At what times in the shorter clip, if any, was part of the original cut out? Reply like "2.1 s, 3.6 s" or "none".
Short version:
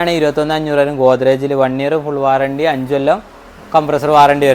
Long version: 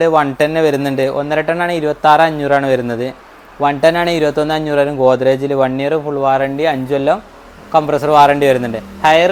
none